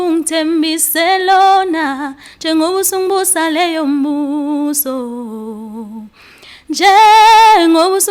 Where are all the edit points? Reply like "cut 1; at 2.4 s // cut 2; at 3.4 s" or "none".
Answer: none